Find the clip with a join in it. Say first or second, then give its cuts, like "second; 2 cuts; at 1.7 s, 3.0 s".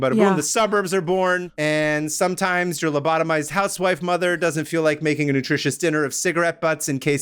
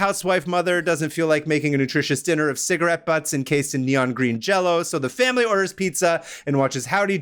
first; 1 cut; at 1.5 s